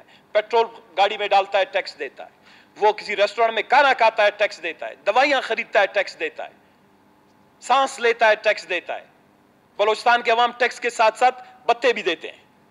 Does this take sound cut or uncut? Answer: uncut